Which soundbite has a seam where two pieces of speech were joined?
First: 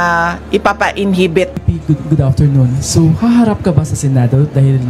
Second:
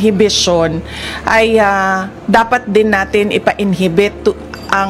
first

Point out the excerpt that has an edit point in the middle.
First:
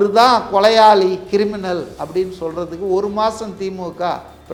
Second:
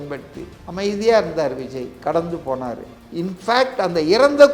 second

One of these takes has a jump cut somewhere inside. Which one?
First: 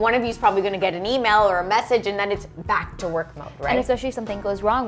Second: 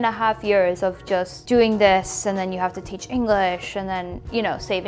second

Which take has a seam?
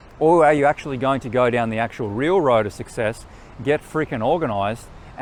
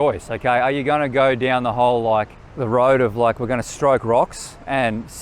second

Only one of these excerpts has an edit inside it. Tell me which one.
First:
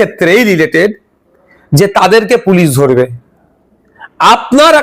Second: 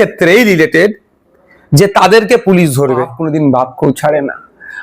second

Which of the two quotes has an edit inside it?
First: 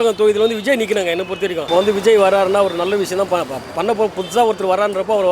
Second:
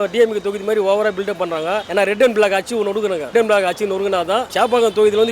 first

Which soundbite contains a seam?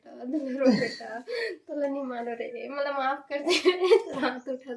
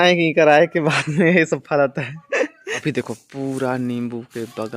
second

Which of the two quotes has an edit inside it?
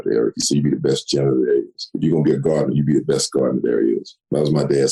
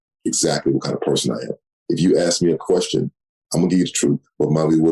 second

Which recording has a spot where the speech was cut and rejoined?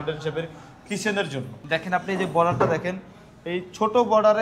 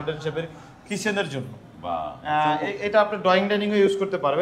first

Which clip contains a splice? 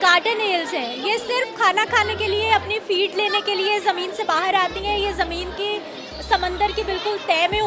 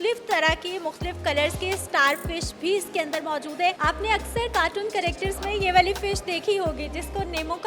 second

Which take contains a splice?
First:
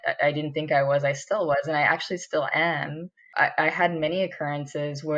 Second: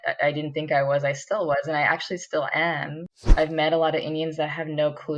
second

